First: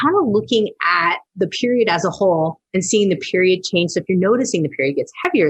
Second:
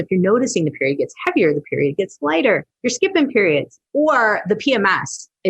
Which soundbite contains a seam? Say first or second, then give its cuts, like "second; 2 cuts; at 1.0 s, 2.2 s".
second; 2 cuts; at 2.8 s, 3.8 s